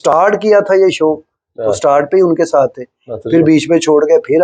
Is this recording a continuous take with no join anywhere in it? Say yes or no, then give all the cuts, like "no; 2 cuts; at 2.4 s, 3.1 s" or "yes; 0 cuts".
yes; 0 cuts